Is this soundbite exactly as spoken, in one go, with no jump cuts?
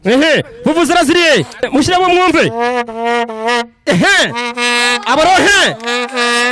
no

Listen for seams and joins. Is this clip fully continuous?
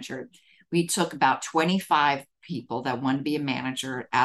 yes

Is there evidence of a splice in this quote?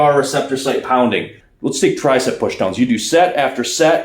yes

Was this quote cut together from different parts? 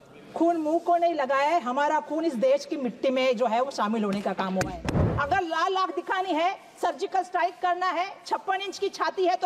yes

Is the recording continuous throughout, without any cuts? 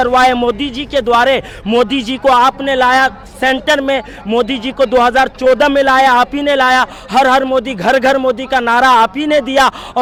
yes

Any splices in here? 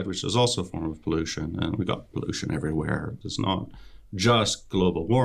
yes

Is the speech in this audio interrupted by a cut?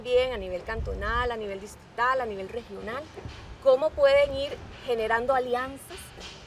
no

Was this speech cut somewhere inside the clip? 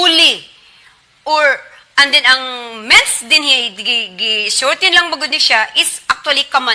no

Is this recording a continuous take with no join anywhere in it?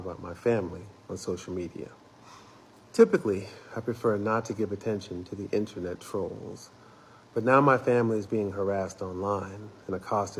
yes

